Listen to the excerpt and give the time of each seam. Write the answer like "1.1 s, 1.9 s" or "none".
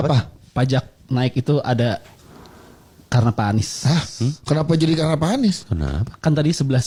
none